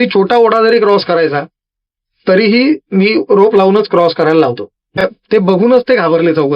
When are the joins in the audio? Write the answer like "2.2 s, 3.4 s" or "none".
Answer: 5.0 s